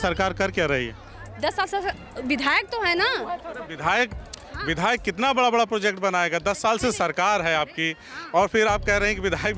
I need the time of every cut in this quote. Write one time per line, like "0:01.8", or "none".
none